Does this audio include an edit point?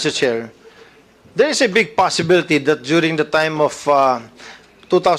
no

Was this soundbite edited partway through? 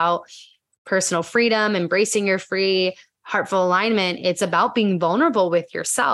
no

